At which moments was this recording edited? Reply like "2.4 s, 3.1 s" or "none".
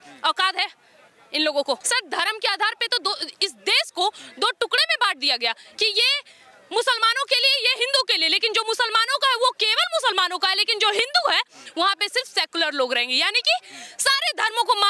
1.8 s